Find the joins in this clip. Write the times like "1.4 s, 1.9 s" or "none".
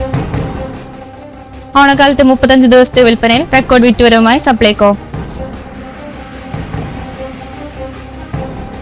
none